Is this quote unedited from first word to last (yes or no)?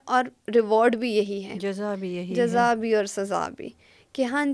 yes